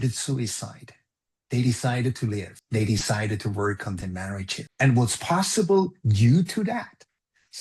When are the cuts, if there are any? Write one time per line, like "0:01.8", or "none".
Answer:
0:02.6
0:04.6